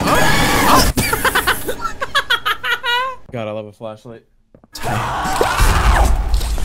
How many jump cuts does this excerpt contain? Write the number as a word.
one